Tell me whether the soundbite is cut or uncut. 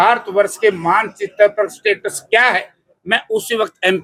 uncut